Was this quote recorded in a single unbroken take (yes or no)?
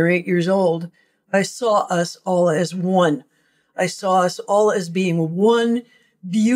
no